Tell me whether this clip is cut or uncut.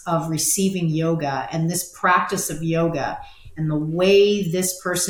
uncut